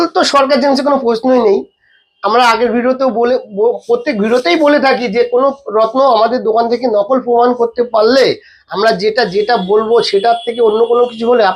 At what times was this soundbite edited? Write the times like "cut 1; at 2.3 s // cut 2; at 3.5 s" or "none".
none